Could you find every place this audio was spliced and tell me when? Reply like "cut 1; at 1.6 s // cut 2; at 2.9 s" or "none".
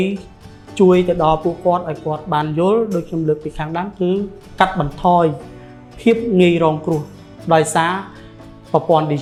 none

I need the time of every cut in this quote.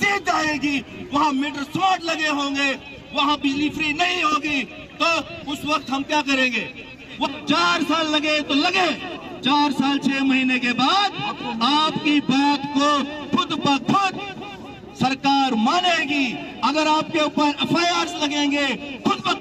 cut 1; at 7.3 s

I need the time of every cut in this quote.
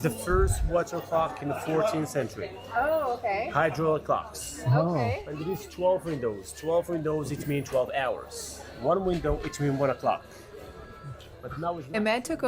none

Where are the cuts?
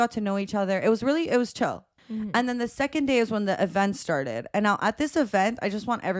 cut 1; at 1.9 s

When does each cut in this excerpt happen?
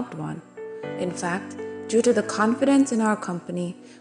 none

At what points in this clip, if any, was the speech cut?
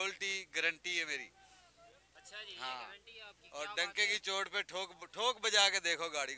none

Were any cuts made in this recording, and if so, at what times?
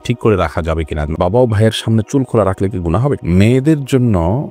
cut 1; at 1.1 s // cut 2; at 3.2 s

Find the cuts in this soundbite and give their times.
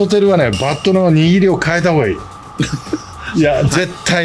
none

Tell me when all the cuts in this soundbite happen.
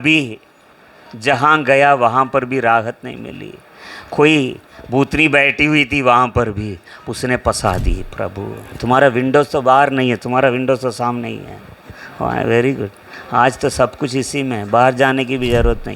cut 1; at 8.7 s

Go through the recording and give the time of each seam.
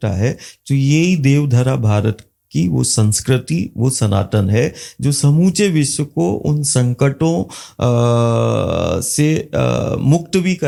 none

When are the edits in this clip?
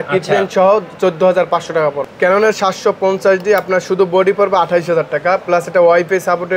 cut 1; at 2.0 s

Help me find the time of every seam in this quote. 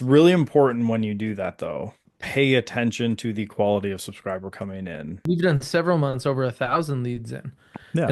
cut 1; at 2.1 s // cut 2; at 5.2 s

